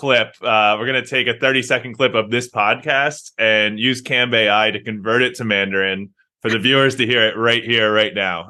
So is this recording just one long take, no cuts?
yes; 0 cuts

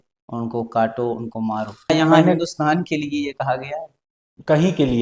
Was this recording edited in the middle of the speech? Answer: yes; 1 cut; at 1.9 s

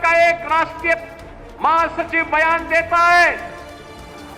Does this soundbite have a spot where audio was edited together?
no; 0 cuts

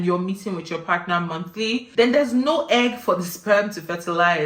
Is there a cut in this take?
yes; 1 cut; at 1.9 s

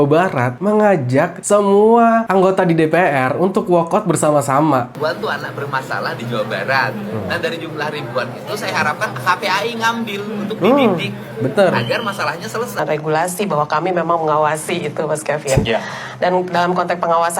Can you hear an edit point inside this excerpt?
yes; 2 cuts; at 4.9 s, 12.8 s

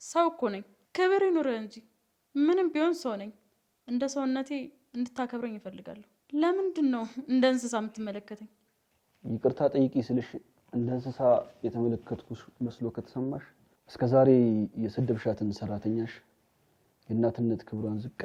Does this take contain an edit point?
no; 0 cuts

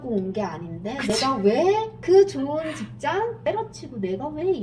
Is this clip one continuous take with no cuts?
yes; 0 cuts

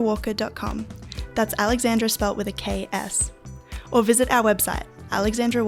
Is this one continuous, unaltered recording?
yes; 0 cuts

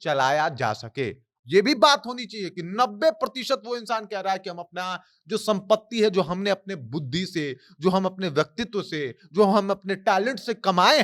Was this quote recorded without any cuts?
no; 1 cut; at 1.2 s

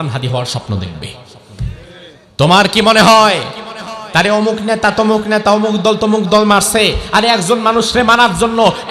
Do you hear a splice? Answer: yes; 1 cut; at 2.2 s

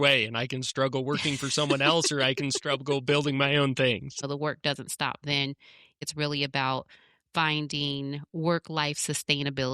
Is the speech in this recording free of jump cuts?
no; 2 cuts; at 4.2 s, 6.0 s

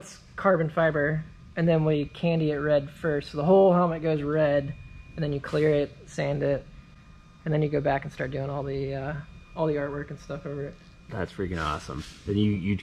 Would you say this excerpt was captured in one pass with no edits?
yes; 0 cuts

